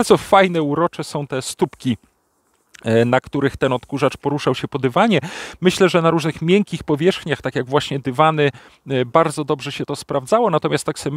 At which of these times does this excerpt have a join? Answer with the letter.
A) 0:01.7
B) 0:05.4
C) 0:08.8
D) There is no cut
D